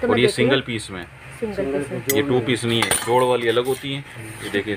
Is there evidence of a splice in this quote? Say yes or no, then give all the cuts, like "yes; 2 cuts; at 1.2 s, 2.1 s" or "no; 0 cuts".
no; 0 cuts